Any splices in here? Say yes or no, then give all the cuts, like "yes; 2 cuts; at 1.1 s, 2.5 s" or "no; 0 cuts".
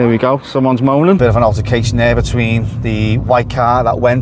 yes; 1 cut; at 1.2 s